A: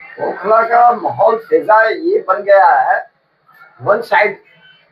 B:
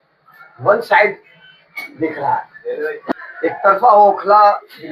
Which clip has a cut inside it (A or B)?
B